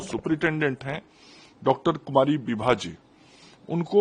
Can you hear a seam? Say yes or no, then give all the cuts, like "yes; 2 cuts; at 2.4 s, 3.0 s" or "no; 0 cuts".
no; 0 cuts